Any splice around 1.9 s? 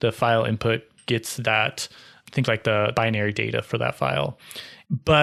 no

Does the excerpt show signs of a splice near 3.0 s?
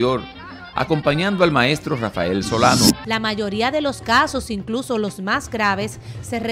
yes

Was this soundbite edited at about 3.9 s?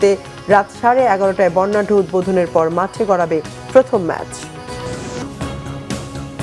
no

